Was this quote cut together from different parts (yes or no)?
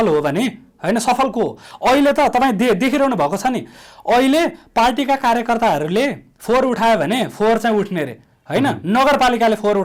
no